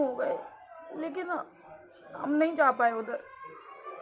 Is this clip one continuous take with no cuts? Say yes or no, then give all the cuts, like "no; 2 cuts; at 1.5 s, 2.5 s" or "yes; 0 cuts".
yes; 0 cuts